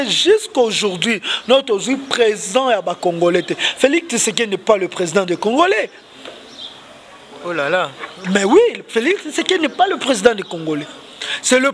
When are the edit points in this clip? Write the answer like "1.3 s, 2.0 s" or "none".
none